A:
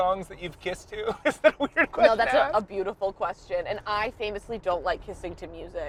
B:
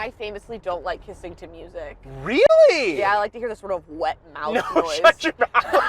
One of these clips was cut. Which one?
B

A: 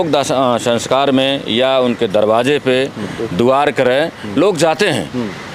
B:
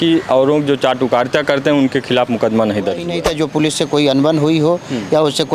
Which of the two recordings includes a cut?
B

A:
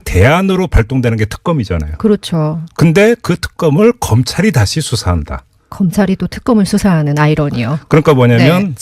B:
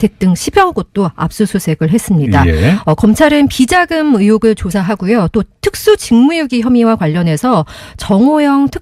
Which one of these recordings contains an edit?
A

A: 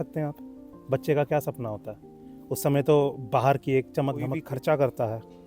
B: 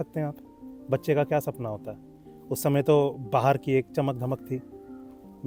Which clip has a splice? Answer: A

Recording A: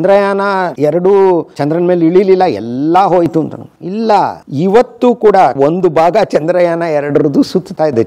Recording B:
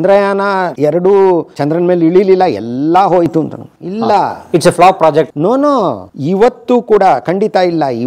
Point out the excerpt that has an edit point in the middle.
A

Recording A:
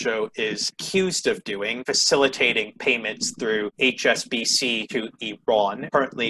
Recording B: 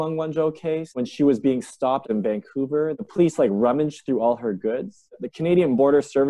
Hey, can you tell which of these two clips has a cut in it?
B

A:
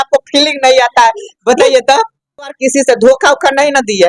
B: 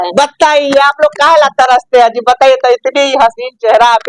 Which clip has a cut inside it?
A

